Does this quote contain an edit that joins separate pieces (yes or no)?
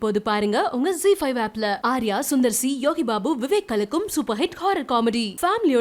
no